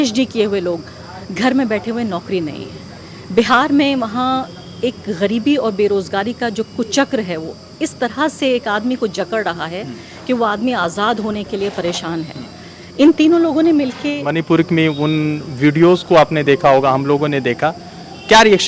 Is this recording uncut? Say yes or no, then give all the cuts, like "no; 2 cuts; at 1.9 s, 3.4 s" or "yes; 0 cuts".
no; 1 cut; at 14.3 s